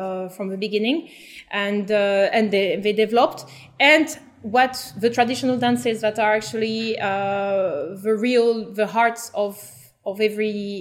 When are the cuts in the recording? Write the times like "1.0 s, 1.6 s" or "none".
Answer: none

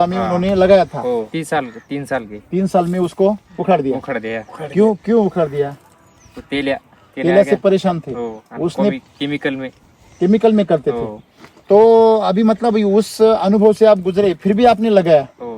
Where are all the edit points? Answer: 1.3 s

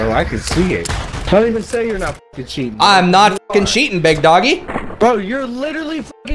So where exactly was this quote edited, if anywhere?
1.0 s

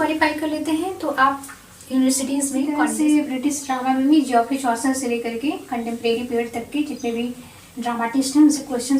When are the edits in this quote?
2.7 s

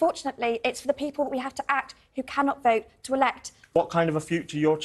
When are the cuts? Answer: 3.6 s

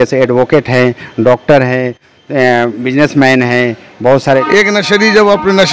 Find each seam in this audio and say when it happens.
4.4 s

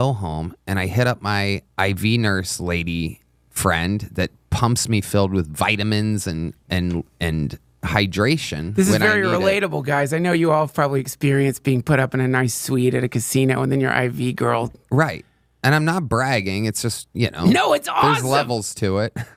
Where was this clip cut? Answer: none

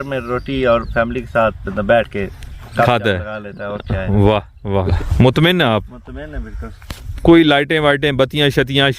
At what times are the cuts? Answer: 4.9 s

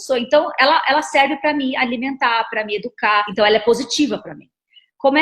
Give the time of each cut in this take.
3.3 s

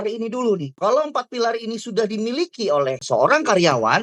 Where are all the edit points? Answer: 0.8 s, 3.0 s

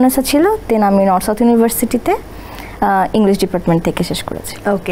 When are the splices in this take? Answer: none

